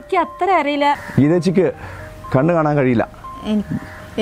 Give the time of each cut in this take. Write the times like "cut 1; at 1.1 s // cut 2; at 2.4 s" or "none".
cut 1; at 1.0 s